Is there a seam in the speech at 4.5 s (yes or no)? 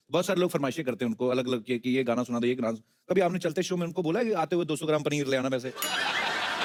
no